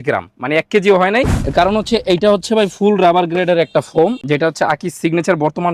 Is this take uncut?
no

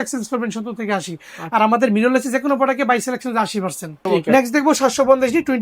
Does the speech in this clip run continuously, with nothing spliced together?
yes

